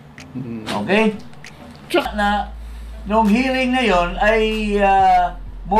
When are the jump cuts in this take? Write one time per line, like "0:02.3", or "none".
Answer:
0:02.1